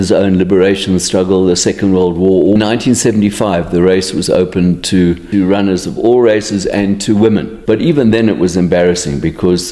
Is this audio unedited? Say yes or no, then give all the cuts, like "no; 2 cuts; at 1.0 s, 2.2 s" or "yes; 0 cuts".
no; 3 cuts; at 2.6 s, 5.2 s, 7.5 s